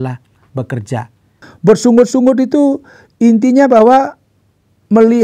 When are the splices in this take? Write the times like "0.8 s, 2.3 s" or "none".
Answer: 1.3 s